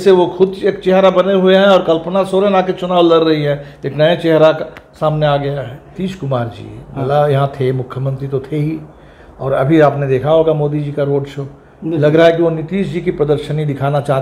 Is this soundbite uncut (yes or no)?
no